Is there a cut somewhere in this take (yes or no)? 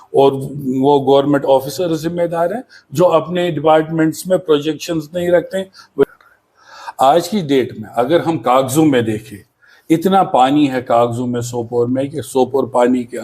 yes